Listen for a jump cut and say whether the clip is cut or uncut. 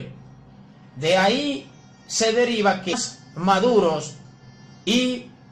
uncut